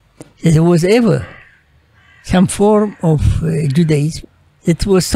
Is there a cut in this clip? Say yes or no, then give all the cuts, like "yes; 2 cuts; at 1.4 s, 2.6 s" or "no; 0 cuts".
yes; 1 cut; at 4.2 s